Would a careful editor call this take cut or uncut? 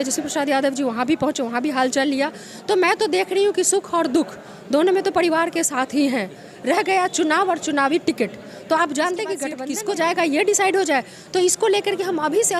cut